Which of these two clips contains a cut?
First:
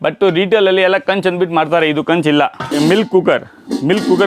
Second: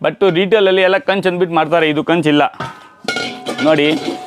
first; 1 cut; at 2.7 s

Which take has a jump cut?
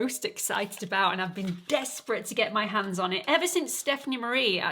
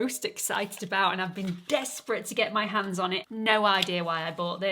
second; 1 cut; at 3.2 s

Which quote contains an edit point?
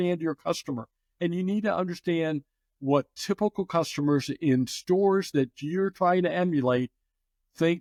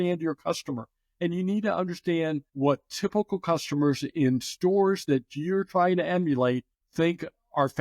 second; 2 cuts; at 2.5 s, 6.8 s

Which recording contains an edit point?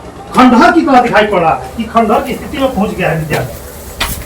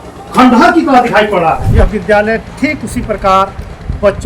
second; 1 cut; at 1.7 s

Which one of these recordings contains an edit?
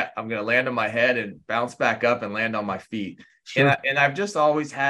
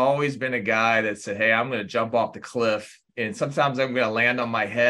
second; 1 cut; at 3.1 s

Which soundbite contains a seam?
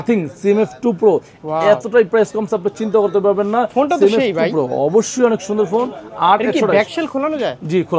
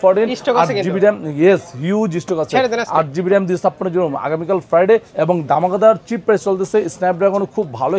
second; 1 cut; at 5.1 s

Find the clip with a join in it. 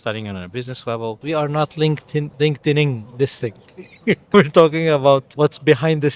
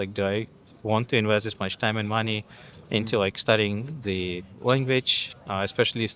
first; 4 cuts; at 1.2 s, 2.3 s, 4.3 s, 5.3 s

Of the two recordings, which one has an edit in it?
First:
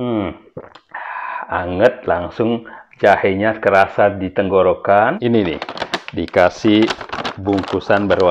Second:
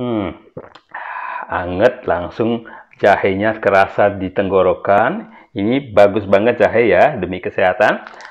first; 1 cut; at 5.0 s

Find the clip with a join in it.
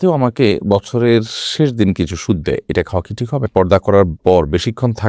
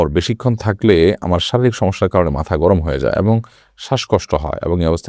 first; 1 cut; at 3.5 s

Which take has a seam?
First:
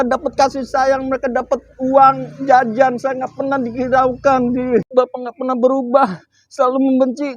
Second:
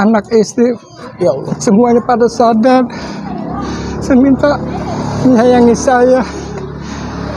first; 1 cut; at 4.9 s

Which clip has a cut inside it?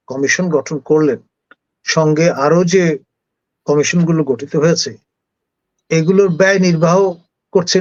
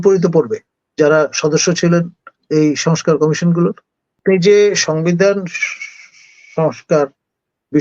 second; 1 cut; at 4.2 s

